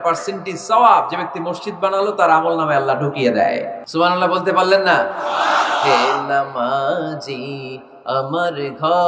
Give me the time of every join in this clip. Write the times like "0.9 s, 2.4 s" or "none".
3.8 s